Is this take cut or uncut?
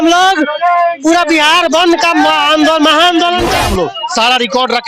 cut